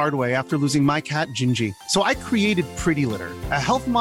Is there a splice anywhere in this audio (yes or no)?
no